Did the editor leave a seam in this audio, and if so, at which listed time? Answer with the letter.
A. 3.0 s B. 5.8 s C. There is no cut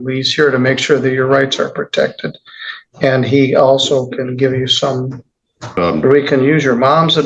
B